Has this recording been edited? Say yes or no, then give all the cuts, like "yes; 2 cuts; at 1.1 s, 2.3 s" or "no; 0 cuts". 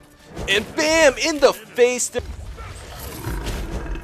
yes; 1 cut; at 2.1 s